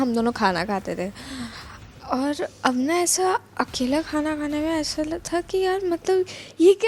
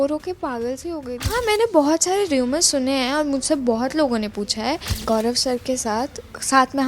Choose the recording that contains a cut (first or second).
second